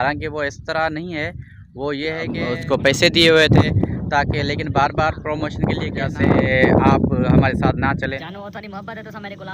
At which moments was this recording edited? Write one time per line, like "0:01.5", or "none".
0:02.4
0:06.1